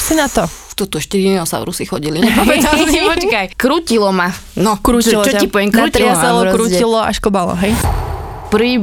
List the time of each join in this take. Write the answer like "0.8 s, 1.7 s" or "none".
3.5 s, 7.9 s